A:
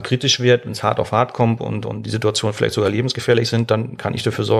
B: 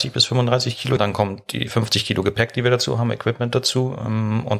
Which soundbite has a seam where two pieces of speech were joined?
B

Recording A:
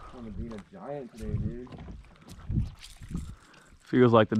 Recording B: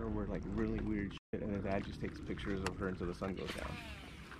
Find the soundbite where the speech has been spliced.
A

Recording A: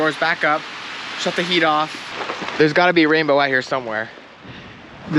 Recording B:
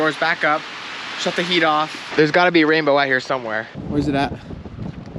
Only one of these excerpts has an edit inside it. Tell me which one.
B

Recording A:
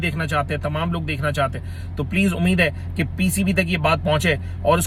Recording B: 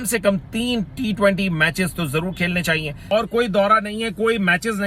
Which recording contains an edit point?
B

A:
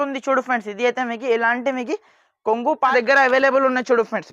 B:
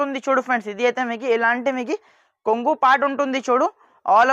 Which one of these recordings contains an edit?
A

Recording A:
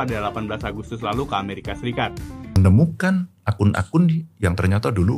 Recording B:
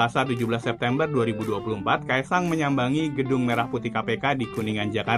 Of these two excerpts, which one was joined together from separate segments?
A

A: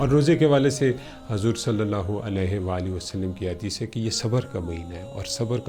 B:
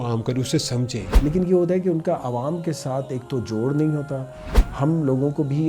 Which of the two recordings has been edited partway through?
B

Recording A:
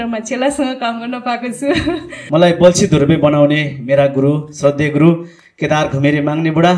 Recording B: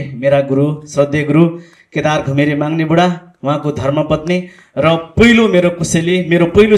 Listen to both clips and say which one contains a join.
A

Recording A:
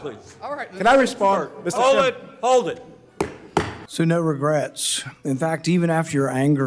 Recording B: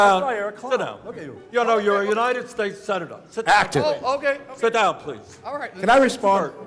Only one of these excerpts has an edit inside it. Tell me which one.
A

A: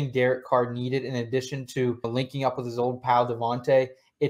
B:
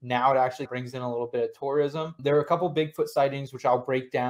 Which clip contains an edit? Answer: A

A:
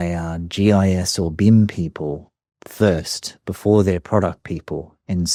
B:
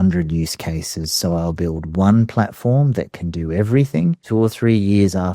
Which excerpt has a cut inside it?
B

